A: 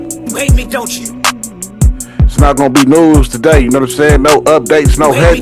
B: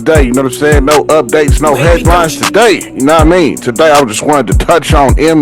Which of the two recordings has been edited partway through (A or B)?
A